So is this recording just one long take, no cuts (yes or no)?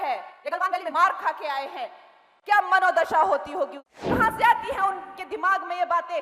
no